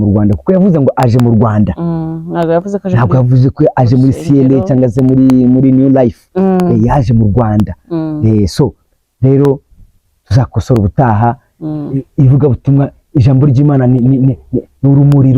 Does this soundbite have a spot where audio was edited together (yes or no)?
no